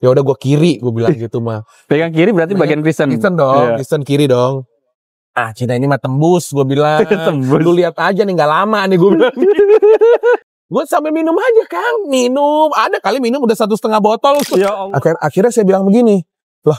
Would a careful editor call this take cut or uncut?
cut